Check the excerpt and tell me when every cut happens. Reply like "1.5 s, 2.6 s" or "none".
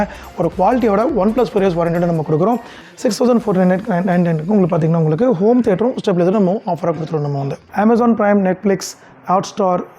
2.8 s, 7.6 s